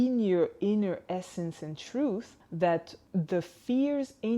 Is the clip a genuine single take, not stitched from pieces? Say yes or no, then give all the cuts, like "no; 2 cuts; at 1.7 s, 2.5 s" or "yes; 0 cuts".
no; 2 cuts; at 2.4 s, 3.0 s